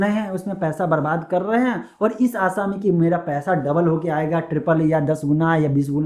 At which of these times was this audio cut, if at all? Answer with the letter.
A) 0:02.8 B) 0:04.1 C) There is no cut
C